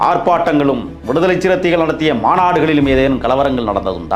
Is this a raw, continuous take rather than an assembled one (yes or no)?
no